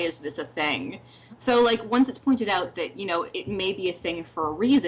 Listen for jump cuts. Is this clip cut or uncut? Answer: cut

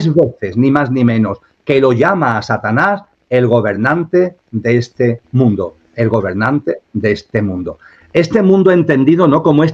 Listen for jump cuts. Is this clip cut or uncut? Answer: uncut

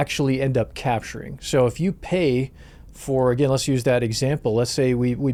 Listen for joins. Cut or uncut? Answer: uncut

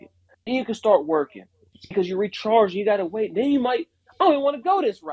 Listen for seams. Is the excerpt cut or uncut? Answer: uncut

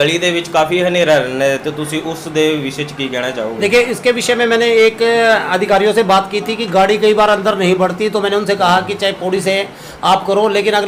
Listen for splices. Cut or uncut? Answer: uncut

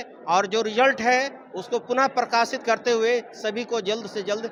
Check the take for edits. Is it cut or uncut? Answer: uncut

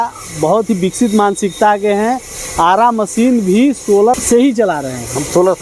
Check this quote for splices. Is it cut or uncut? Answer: uncut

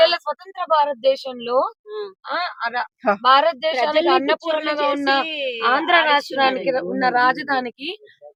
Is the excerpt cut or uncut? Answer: uncut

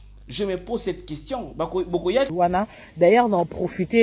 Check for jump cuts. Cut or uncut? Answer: cut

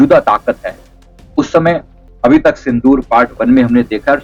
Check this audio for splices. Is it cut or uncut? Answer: cut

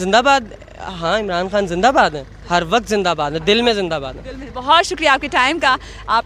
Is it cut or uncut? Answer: uncut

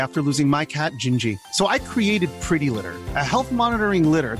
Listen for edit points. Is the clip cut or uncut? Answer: uncut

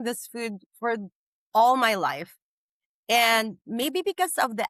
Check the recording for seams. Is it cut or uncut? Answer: uncut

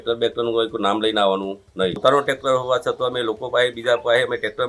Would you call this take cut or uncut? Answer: cut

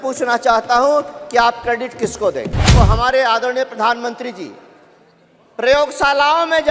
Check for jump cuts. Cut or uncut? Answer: cut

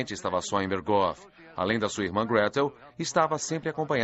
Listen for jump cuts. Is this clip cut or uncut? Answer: cut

